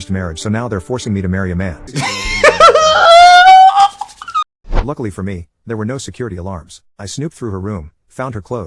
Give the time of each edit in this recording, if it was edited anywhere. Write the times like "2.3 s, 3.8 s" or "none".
1.9 s, 4.8 s